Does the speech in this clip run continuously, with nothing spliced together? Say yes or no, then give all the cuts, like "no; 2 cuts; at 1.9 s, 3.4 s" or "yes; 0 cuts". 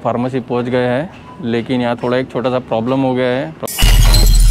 yes; 0 cuts